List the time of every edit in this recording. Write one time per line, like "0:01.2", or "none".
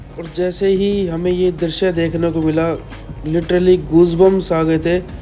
none